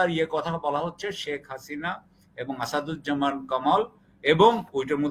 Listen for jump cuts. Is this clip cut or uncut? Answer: uncut